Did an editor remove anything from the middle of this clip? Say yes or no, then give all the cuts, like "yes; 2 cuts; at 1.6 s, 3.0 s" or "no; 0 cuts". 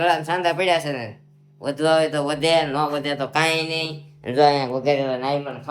no; 0 cuts